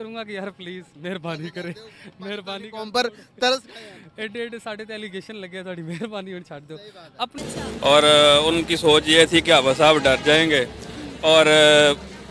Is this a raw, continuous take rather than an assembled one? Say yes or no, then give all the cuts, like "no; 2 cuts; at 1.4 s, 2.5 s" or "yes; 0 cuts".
no; 1 cut; at 7.4 s